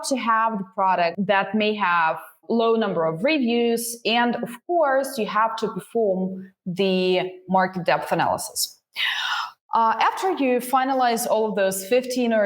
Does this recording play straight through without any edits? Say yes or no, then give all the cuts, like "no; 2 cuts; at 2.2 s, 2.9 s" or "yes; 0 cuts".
no; 2 cuts; at 1.1 s, 2.4 s